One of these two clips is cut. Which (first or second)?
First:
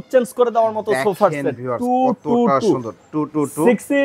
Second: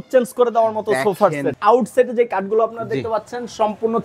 second